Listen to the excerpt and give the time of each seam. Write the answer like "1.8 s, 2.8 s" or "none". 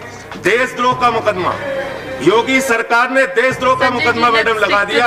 none